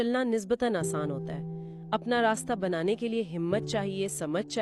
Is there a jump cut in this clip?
no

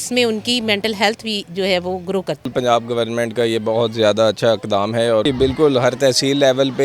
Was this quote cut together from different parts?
yes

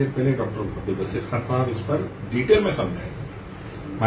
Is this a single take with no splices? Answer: yes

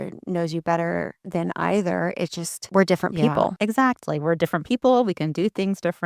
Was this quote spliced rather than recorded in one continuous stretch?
yes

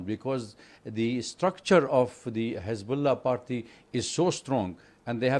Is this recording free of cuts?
yes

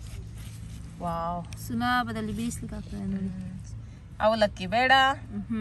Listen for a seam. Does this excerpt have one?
yes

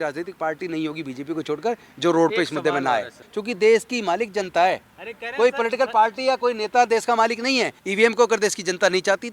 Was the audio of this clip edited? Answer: yes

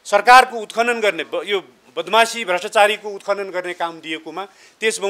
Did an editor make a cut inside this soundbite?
no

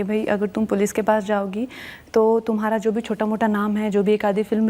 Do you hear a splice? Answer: no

